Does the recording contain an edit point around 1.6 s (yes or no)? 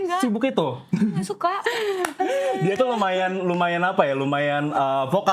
yes